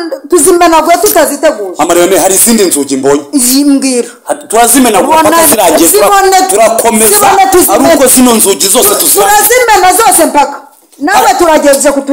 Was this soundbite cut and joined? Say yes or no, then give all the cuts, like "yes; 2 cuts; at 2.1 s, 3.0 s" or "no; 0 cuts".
no; 0 cuts